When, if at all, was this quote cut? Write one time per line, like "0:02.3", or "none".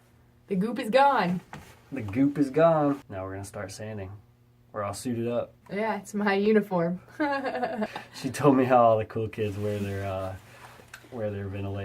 0:03.1
0:05.6
0:07.9

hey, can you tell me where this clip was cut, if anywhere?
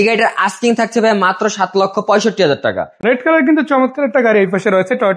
none

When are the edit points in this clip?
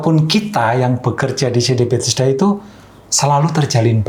none

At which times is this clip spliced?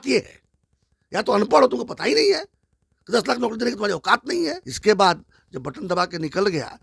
0:04.7

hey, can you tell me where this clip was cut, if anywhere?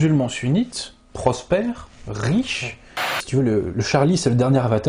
0:03.2

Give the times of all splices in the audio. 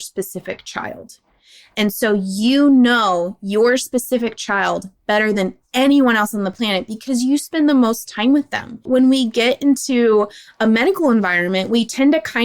0:08.9

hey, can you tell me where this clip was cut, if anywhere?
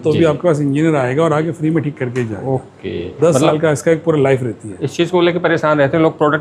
none

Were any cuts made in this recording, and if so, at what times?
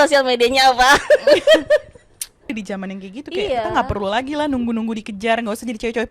0:02.5

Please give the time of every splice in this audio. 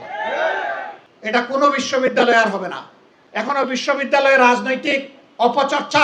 0:01.0
0:03.5

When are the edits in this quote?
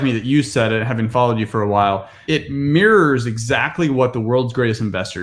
0:02.2

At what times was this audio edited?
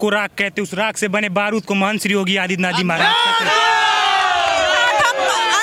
none

